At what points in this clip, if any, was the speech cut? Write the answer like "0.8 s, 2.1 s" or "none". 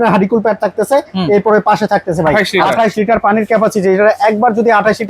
2.5 s

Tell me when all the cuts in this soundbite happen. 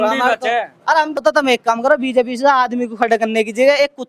1.2 s

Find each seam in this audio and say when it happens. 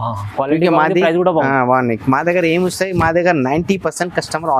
none

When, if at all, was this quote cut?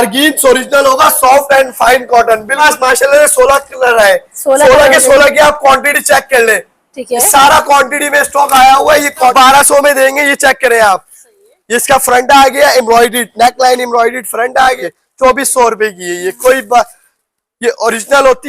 2.6 s, 9.3 s, 14.8 s

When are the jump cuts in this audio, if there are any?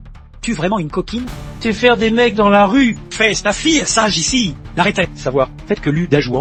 none

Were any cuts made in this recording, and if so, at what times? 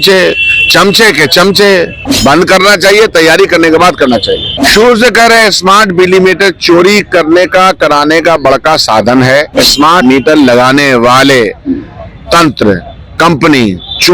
2.0 s, 4.5 s, 9.5 s

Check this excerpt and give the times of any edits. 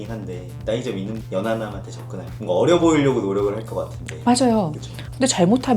none

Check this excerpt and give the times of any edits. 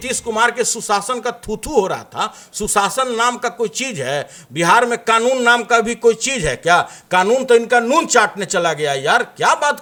none

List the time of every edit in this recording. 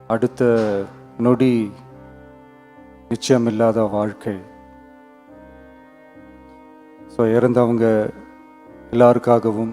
1.8 s, 3.1 s, 4.4 s, 7.2 s

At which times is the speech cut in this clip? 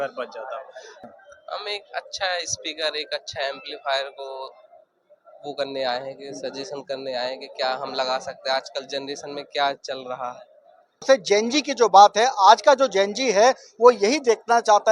1.0 s, 11.0 s

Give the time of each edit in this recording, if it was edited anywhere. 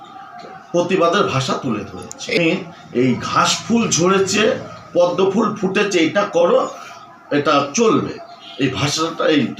2.4 s

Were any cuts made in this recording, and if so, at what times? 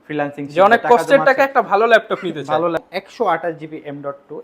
2.8 s

